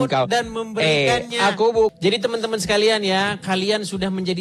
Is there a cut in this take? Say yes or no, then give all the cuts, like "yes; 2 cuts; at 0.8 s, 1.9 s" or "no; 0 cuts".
yes; 1 cut; at 1.9 s